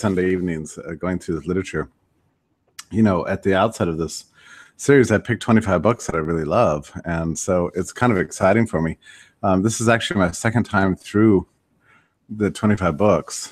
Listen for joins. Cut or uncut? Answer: cut